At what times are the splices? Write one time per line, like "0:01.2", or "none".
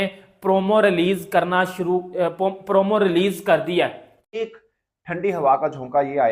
0:04.1